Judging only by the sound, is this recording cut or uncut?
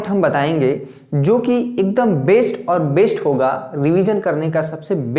uncut